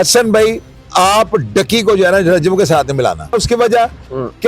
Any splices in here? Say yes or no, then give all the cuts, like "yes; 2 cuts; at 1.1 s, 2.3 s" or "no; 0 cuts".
yes; 1 cut; at 3.3 s